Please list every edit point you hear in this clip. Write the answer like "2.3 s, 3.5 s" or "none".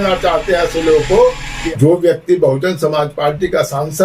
1.5 s